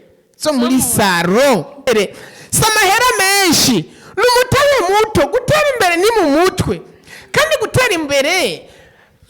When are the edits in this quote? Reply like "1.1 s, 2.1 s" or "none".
1.9 s